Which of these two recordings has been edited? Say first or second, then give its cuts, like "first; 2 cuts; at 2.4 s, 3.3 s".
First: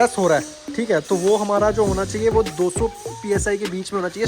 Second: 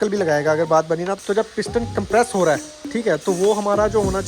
second; 1 cut; at 1.2 s